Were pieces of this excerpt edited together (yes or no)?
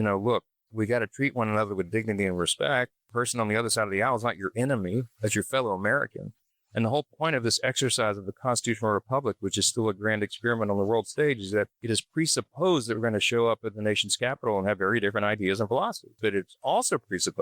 yes